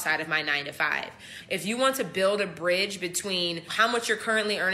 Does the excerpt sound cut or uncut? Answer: cut